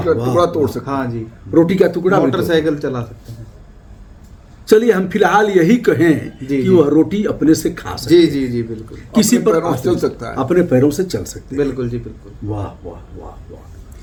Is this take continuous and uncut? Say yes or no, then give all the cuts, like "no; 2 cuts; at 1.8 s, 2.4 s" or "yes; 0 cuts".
yes; 0 cuts